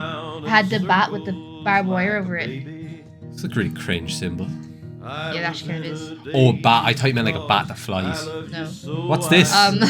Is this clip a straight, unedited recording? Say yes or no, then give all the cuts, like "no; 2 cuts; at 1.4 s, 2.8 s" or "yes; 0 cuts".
yes; 0 cuts